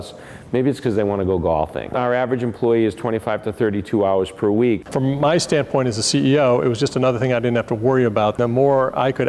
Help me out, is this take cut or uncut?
cut